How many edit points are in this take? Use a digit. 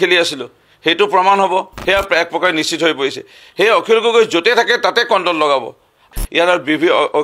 2